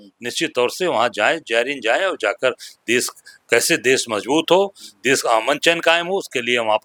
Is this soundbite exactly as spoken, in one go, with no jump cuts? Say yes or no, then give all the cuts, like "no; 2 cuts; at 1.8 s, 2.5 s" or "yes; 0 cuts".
yes; 0 cuts